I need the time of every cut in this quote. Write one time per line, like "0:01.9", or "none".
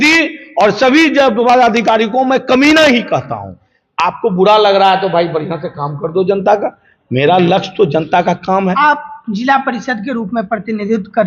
none